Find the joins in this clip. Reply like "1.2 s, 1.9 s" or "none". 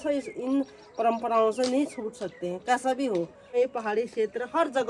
3.5 s